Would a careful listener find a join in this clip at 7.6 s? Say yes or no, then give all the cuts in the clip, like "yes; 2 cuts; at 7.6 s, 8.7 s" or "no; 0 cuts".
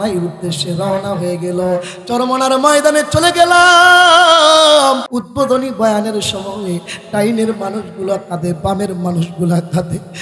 no; 1 cut; at 5.1 s